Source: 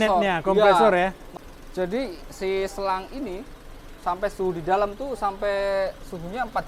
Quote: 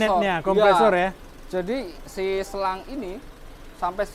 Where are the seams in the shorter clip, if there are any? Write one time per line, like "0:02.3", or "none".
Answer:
0:01.3